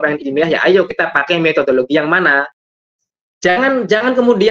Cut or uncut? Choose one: cut